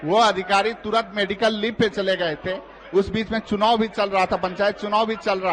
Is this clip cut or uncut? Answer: uncut